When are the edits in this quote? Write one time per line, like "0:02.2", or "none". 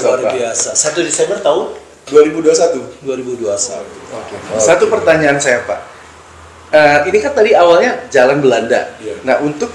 0:04.0